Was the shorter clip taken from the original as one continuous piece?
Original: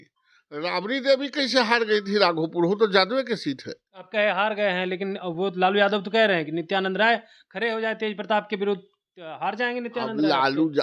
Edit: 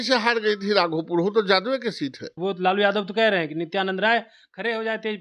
no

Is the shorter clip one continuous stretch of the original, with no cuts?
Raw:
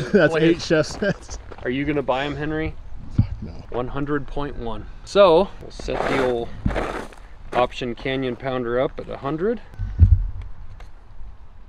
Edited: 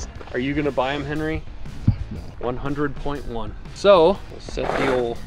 yes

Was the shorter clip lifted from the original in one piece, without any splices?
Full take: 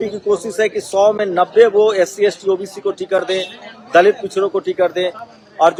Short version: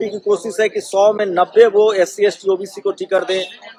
yes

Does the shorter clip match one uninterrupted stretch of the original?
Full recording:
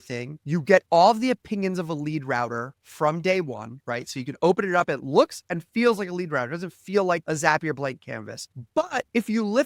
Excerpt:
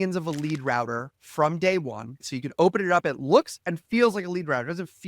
no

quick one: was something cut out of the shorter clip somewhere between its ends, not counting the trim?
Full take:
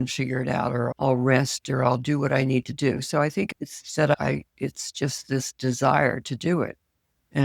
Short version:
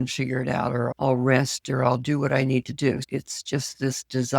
yes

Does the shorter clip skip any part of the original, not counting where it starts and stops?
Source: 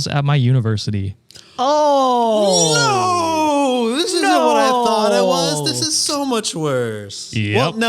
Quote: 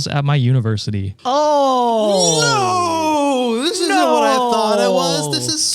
yes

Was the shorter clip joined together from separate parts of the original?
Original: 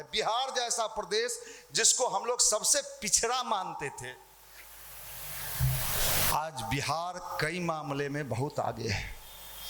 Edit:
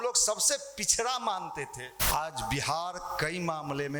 yes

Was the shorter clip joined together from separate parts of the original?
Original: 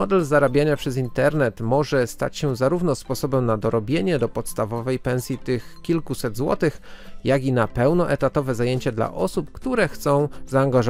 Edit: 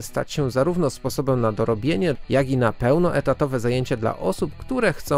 yes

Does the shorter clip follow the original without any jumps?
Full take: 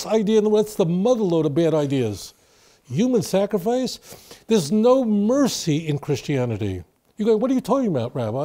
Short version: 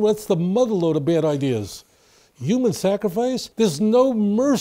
no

